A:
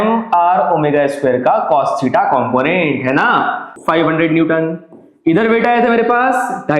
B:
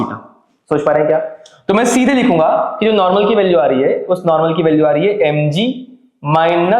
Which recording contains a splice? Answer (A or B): A